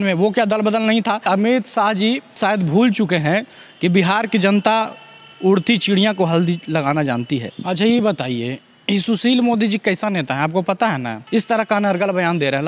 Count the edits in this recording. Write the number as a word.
four